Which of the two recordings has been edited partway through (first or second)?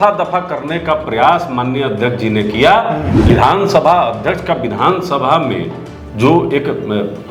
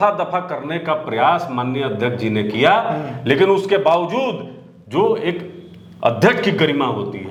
first